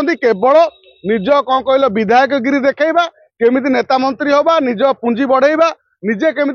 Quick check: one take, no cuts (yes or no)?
yes